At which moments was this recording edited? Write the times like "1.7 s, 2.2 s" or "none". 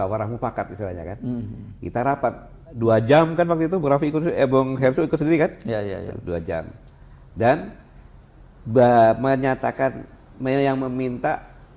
none